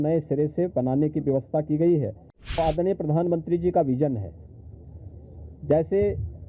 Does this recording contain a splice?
yes; 1 cut; at 2.6 s

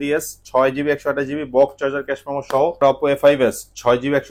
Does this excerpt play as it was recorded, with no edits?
no; 1 cut; at 2.8 s

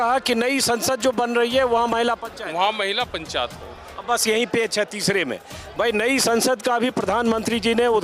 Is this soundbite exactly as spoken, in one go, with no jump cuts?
yes; 0 cuts

